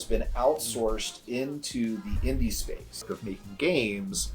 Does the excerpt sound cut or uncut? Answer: cut